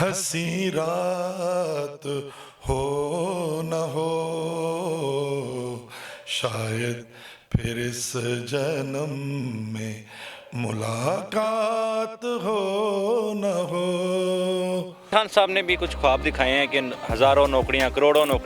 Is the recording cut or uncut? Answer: cut